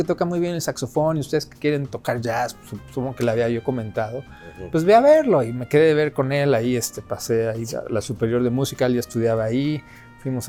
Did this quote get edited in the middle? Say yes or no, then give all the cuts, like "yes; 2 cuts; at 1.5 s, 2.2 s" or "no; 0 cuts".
no; 0 cuts